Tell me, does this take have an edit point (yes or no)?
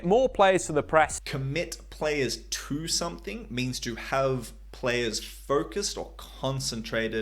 no